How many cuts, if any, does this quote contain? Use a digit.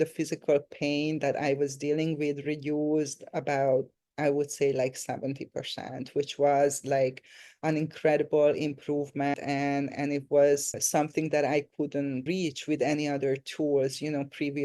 3